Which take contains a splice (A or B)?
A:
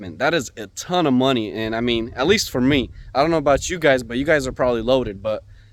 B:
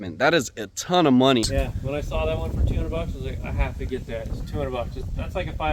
B